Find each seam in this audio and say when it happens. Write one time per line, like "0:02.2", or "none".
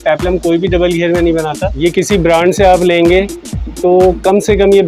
0:01.7